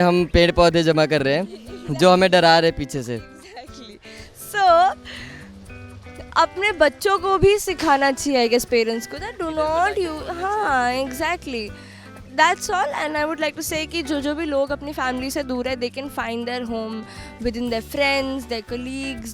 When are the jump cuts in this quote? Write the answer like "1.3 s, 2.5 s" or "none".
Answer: none

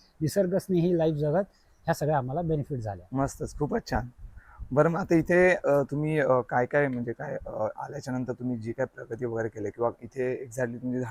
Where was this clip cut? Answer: none

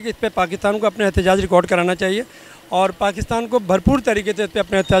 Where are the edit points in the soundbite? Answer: none

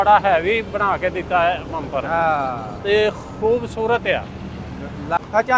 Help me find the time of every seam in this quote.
none

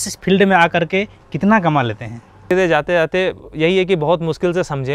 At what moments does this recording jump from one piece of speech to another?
2.5 s

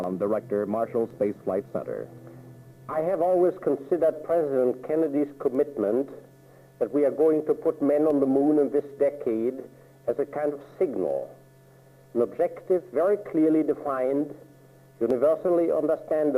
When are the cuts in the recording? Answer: none

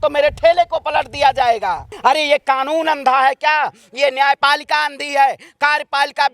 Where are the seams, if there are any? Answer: 1.9 s

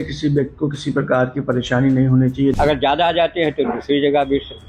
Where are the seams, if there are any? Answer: 2.5 s

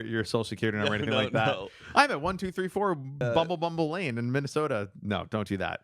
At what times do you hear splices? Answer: 3.2 s

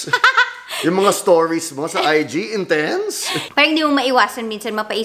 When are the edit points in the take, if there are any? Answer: 3.4 s

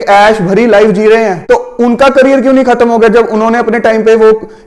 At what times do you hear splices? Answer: 1.4 s

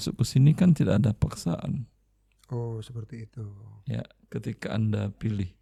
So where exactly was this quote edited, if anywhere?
none

